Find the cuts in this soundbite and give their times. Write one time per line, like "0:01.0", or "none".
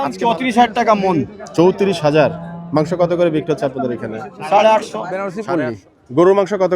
0:05.4